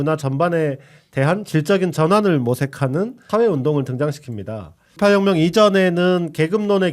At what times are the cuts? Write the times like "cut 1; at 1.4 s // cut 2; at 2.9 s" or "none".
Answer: cut 1; at 3.2 s // cut 2; at 5.0 s